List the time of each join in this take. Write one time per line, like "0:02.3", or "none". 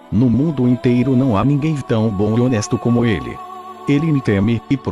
0:02.6